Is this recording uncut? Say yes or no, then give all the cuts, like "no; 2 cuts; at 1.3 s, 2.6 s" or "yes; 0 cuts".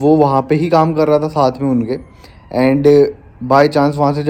yes; 0 cuts